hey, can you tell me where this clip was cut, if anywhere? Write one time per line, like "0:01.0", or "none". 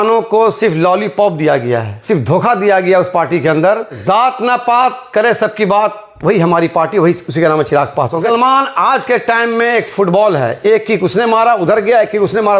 0:04.0
0:08.2

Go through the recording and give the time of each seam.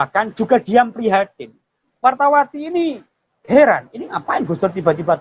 0:01.9

